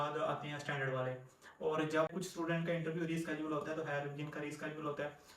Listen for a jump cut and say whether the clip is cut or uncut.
cut